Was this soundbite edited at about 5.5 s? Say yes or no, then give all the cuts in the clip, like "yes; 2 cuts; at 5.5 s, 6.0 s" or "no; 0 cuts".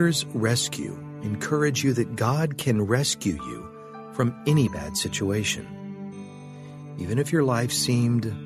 yes; 2 cuts; at 5.5 s, 6.9 s